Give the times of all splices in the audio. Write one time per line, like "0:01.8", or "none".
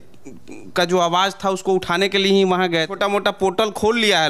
0:02.9

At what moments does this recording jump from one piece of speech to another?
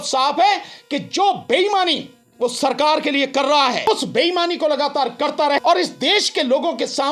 0:03.9
0:05.6

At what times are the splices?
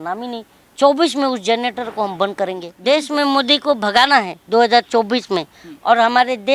0:02.7

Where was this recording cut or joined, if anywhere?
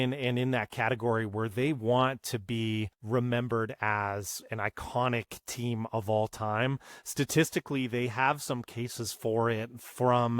0:02.9

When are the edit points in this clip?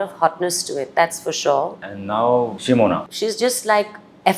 0:01.7
0:03.0

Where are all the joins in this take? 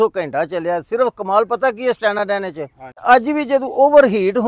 0:03.0

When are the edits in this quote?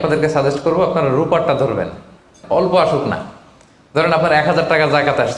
0:02.4

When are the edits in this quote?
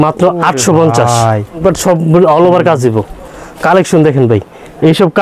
0:01.6

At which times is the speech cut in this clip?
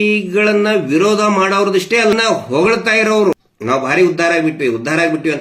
0:02.1
0:03.5

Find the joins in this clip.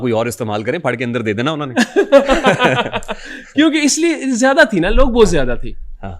none

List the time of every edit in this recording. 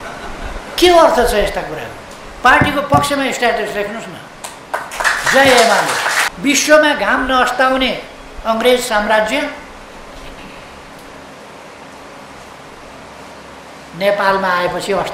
0:06.2

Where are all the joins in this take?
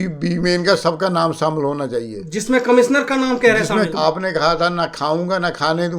0:03.9

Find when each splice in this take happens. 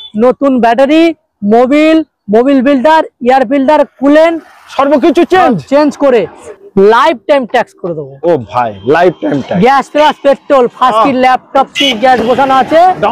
0:06.4

